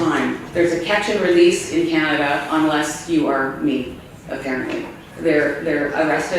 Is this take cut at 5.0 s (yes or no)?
yes